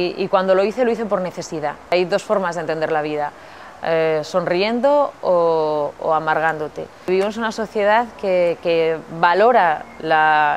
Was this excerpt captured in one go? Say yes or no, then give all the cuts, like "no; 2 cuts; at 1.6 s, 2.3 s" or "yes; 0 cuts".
no; 2 cuts; at 1.9 s, 7.1 s